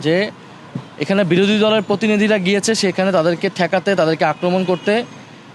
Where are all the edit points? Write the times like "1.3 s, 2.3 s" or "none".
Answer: none

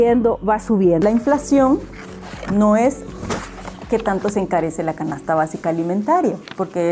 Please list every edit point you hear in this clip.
none

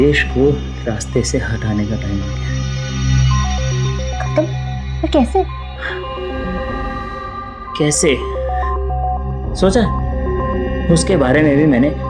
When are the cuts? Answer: none

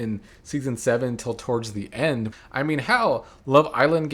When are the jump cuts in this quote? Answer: 2.3 s

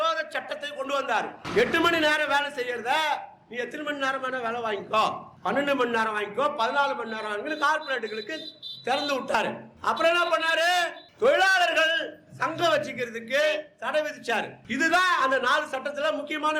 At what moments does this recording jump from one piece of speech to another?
none

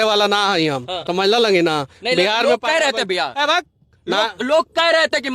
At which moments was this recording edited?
0.9 s

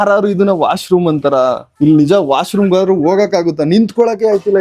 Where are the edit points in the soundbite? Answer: none

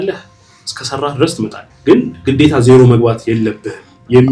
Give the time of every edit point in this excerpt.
1.6 s

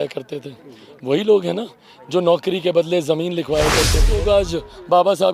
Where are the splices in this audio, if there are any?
4.1 s

